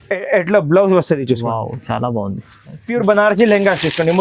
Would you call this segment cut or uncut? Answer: cut